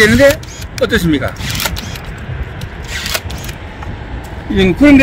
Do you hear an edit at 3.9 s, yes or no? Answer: no